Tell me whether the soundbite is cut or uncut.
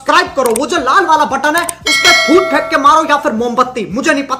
uncut